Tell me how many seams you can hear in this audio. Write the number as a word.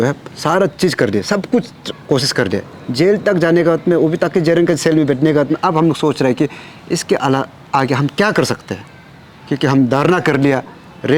zero